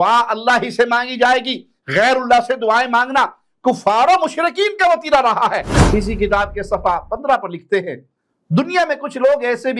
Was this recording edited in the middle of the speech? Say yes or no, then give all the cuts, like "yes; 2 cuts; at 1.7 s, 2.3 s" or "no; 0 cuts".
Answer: yes; 1 cut; at 5.7 s